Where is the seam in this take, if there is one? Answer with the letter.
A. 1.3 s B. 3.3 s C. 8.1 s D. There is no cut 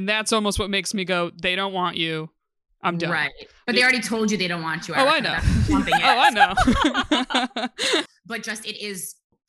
C